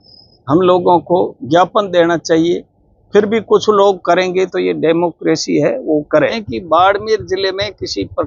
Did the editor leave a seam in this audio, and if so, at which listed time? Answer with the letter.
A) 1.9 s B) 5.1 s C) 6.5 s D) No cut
C